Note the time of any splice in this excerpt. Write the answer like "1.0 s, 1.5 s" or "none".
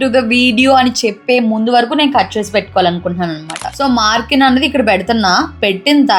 3.6 s